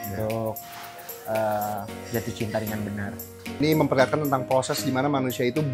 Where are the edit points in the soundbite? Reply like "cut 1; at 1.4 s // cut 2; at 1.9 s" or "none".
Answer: cut 1; at 3.6 s